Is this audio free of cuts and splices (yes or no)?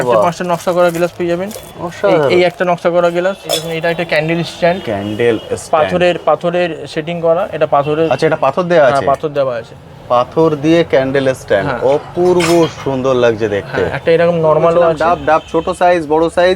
no